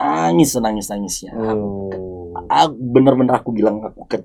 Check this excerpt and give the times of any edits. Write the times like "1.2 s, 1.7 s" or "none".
none